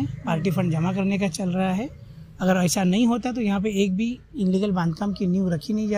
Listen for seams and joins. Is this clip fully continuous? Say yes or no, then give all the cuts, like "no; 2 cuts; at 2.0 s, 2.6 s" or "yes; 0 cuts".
yes; 0 cuts